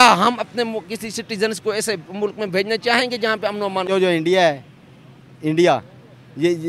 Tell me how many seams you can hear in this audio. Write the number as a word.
one